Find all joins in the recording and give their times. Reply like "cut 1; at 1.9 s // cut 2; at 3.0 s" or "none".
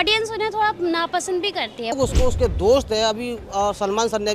cut 1; at 2.0 s